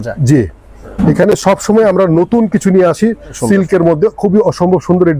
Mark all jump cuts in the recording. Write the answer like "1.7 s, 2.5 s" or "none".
3.4 s